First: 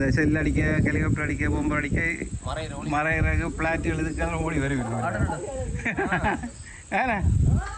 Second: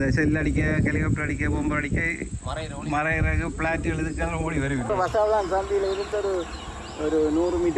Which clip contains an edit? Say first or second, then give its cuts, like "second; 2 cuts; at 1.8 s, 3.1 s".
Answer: second; 1 cut; at 4.9 s